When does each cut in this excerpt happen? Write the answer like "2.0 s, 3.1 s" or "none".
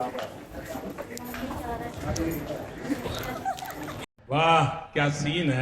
4.1 s